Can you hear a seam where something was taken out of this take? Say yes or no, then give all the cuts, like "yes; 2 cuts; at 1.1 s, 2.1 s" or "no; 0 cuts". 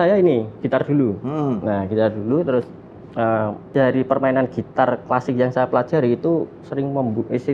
yes; 1 cut; at 3.6 s